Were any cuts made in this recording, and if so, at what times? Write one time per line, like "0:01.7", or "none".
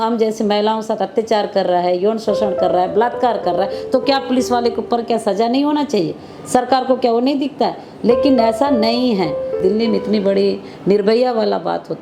0:09.5